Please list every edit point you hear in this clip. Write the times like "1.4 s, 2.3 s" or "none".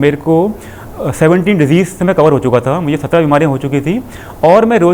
none